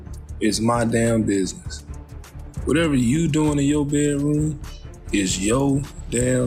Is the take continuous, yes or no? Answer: yes